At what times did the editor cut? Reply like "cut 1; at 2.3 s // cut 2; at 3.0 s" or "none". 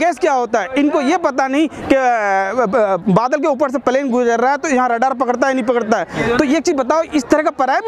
none

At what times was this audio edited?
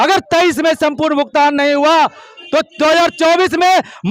none

